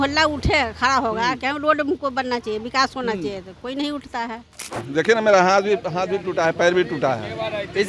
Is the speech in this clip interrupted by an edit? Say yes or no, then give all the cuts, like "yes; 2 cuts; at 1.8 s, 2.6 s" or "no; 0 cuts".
yes; 1 cut; at 4.8 s